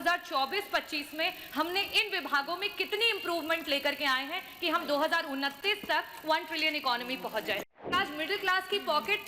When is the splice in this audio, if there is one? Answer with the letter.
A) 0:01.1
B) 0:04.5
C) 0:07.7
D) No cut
C